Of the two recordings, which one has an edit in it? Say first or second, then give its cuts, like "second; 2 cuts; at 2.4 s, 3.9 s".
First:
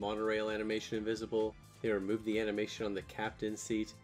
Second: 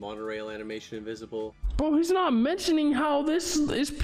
second; 1 cut; at 1.6 s